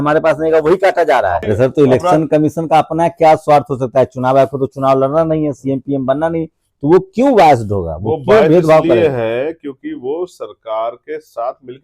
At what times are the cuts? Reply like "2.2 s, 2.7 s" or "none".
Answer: 1.4 s